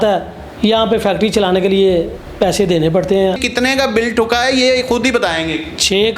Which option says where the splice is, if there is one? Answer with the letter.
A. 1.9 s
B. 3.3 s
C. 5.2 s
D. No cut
B